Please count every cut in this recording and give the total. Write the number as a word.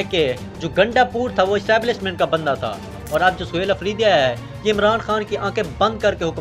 one